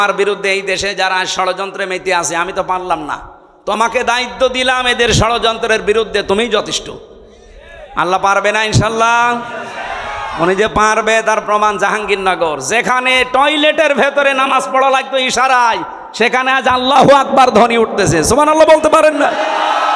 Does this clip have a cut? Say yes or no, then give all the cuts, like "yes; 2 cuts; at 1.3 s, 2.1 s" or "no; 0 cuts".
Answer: no; 0 cuts